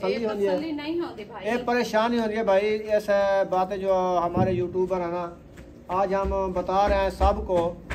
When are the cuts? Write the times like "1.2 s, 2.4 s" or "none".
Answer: none